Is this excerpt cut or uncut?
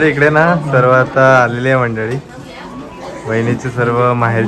uncut